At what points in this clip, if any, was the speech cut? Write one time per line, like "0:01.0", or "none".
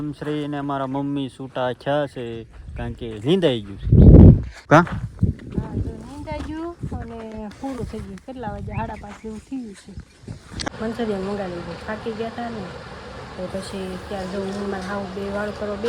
0:04.6
0:10.7